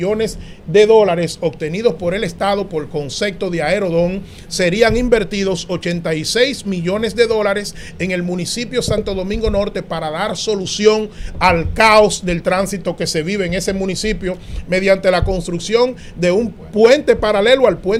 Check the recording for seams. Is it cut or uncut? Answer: uncut